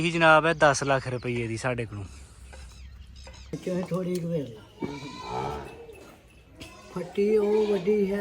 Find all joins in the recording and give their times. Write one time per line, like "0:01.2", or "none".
0:03.6